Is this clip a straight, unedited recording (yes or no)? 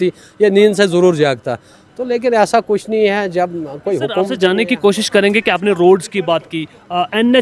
no